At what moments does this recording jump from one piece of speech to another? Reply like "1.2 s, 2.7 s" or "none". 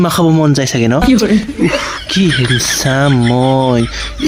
none